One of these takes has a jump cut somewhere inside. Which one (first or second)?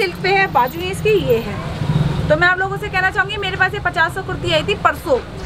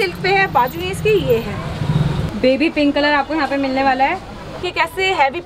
second